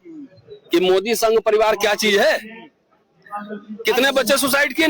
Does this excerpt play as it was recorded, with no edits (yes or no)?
yes